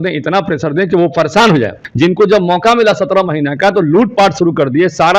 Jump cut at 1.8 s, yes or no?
yes